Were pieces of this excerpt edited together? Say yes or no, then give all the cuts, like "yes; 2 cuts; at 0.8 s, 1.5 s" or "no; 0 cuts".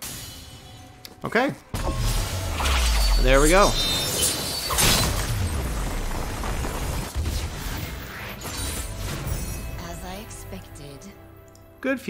no; 0 cuts